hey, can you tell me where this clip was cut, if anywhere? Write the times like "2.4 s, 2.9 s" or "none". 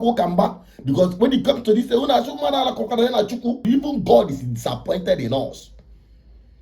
3.6 s